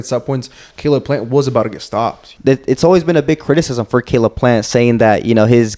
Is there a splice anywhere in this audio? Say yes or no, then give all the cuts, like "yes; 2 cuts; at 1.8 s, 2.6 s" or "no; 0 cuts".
yes; 1 cut; at 2.2 s